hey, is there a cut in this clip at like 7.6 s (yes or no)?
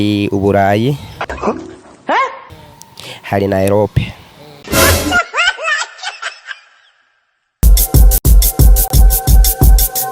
yes